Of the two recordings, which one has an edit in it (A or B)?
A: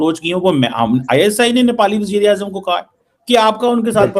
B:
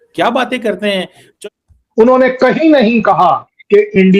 B